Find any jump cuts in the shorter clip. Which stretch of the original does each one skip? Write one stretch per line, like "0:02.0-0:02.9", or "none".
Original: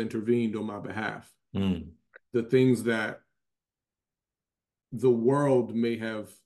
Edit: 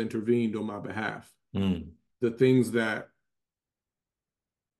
0:02.0-0:02.1